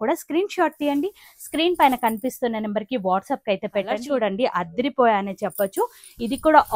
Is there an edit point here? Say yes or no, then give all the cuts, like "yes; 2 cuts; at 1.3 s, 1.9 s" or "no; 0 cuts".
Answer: yes; 1 cut; at 4.0 s